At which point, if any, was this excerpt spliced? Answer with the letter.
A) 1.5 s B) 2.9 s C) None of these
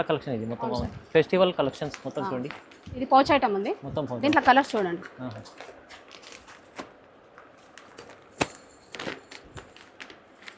C